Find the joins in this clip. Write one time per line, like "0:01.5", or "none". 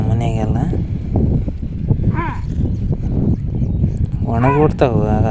none